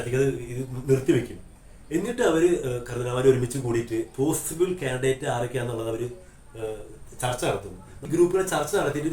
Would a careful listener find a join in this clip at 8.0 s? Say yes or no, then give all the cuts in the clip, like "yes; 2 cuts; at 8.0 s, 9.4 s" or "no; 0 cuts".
yes; 1 cut; at 8.0 s